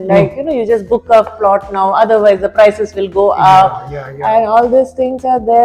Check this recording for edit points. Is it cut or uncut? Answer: uncut